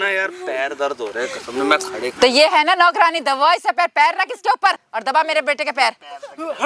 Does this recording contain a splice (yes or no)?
yes